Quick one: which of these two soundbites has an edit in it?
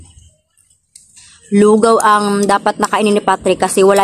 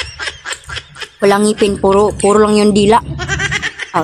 second; 1 cut; at 1.1 s

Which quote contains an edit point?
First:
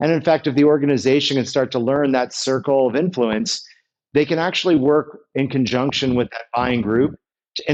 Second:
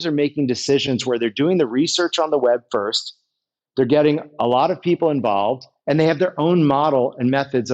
second; 1 cut; at 5.7 s

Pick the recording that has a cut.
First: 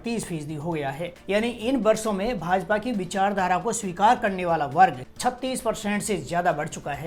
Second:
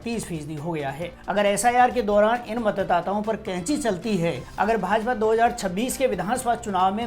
second; 2 cuts; at 1.2 s, 4.4 s

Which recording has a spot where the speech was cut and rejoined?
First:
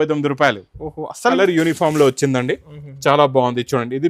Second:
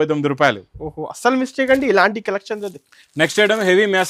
first; 1 cut; at 1.4 s

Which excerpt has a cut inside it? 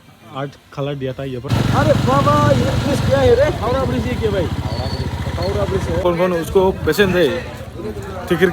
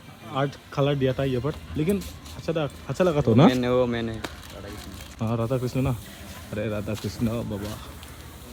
first; 2 cuts; at 1.5 s, 6.0 s

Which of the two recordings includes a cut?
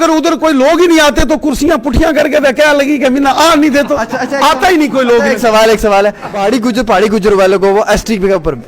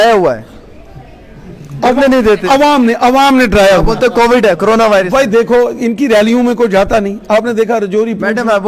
first; 1 cut; at 6.3 s

